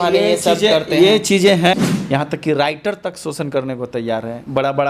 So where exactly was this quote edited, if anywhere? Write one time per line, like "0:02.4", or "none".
0:01.7